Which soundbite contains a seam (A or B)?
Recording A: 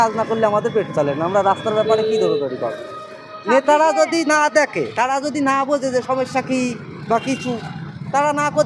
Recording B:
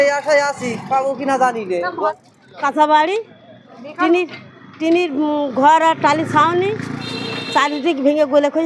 B